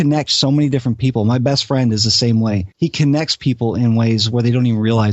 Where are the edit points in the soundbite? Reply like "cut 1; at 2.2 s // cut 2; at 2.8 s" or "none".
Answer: cut 1; at 2.7 s